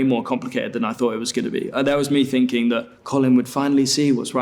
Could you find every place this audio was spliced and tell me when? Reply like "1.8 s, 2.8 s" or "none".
2.9 s